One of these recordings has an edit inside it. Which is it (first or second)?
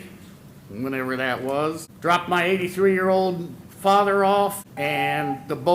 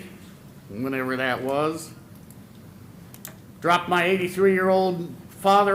first